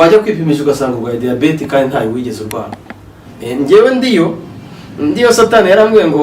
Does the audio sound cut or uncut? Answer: cut